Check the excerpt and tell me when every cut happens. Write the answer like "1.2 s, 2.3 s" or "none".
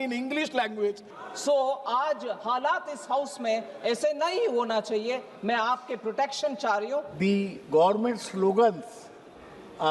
1.1 s, 7.1 s